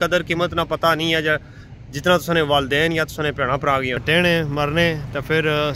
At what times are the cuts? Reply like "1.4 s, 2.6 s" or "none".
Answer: 4.0 s